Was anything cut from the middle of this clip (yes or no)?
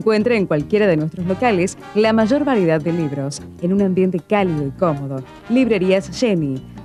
no